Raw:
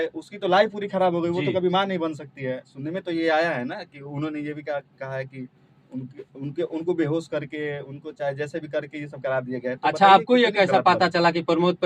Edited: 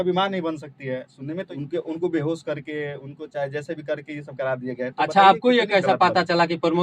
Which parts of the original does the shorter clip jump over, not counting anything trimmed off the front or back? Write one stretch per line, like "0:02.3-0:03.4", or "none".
0:03.0-0:06.3